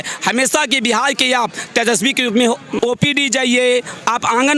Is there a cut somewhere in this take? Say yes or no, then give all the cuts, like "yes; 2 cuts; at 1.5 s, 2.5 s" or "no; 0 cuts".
yes; 1 cut; at 2.8 s